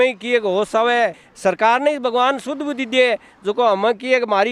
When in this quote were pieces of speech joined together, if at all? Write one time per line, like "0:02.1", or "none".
0:01.2